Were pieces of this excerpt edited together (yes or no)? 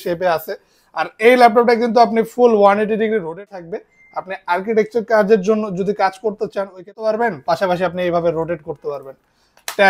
yes